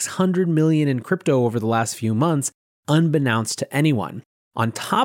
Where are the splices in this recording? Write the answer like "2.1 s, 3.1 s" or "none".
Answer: none